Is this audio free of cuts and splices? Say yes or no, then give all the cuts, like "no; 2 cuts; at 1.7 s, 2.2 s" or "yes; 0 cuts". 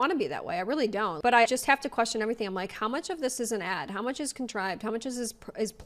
yes; 0 cuts